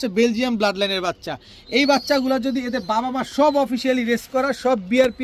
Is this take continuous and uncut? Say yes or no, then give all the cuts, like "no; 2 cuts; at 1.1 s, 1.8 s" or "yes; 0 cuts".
yes; 0 cuts